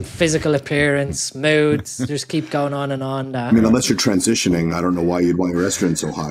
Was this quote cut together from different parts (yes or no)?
no